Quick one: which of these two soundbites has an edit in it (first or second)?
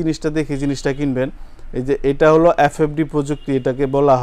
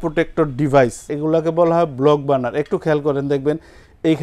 second